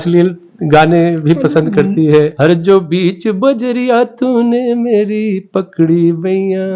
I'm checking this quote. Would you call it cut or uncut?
cut